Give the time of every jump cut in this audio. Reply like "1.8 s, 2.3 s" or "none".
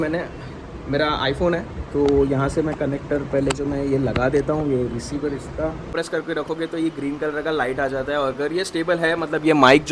5.8 s